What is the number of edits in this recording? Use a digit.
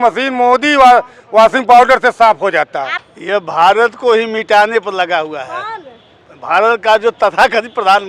1